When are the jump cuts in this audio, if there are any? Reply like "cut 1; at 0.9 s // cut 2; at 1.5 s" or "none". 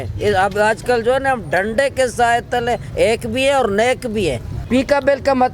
cut 1; at 4.5 s